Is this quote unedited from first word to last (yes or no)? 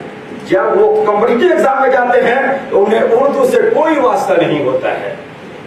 yes